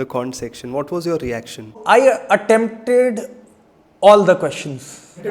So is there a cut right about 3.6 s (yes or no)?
no